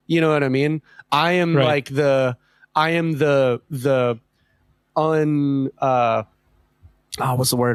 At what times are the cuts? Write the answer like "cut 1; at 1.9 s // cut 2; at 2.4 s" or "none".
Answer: none